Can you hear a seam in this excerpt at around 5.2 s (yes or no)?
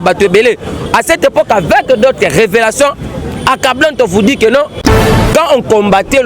yes